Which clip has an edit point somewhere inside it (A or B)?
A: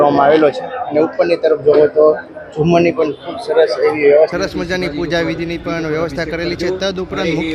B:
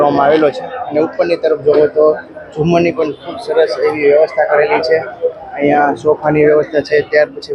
A